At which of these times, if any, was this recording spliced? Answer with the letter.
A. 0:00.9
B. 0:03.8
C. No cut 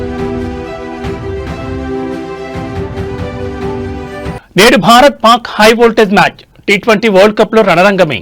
B